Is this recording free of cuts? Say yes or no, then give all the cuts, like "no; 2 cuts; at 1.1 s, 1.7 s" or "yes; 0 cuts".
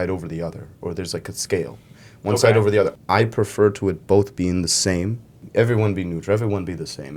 no; 2 cuts; at 2.9 s, 5.4 s